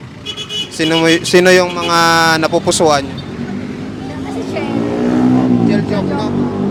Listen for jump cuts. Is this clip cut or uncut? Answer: uncut